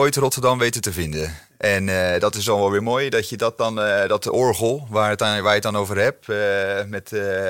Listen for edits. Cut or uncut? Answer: uncut